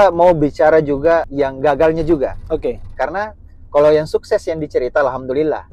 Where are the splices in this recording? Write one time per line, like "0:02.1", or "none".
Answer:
0:01.3